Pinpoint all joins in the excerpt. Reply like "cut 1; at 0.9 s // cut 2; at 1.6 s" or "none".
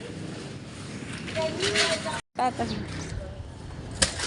cut 1; at 2.2 s